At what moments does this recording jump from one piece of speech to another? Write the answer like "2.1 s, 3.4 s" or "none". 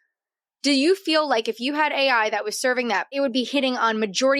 3.1 s